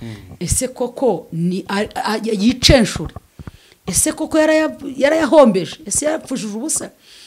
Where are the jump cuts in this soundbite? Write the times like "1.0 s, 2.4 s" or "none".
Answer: none